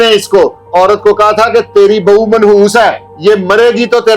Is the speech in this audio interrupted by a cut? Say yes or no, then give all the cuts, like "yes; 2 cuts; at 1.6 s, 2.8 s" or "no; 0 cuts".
yes; 1 cut; at 3.1 s